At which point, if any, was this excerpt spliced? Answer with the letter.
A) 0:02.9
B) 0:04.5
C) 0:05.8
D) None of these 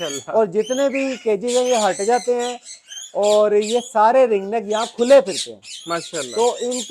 D